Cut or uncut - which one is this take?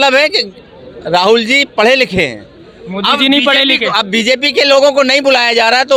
uncut